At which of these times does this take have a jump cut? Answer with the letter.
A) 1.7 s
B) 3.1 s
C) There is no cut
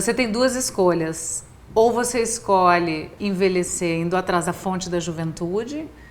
B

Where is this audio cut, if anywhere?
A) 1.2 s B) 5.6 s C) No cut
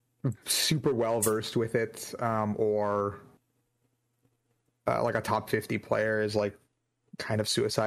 C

